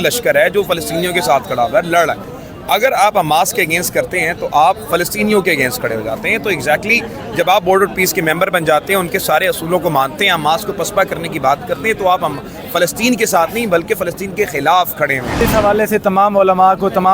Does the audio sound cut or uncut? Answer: cut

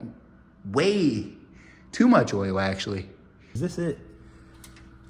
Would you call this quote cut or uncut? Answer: cut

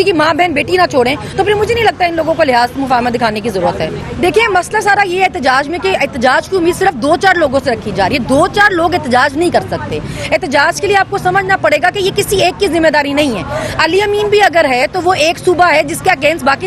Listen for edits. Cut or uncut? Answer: uncut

